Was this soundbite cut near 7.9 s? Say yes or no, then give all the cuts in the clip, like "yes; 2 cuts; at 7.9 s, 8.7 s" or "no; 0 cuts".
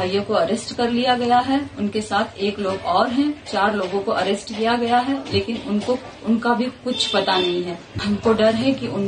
yes; 1 cut; at 7.9 s